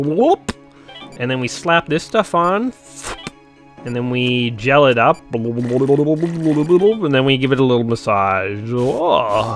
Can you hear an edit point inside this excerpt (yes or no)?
no